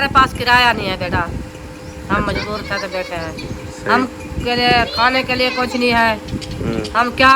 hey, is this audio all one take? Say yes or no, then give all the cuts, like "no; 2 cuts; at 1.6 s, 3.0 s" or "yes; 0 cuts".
yes; 0 cuts